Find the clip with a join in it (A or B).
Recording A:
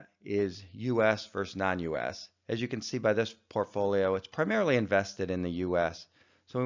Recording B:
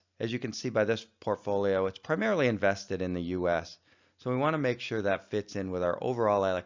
A